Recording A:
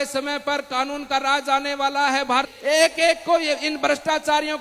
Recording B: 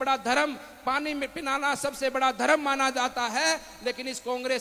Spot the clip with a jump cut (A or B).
A